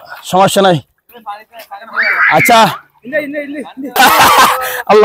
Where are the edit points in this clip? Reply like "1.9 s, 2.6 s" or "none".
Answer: 4.0 s